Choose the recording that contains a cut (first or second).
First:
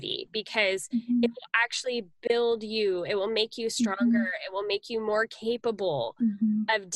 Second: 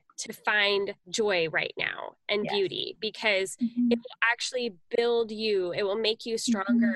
second